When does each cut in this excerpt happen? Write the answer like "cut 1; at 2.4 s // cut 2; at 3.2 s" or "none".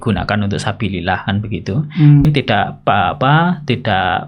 cut 1; at 2.2 s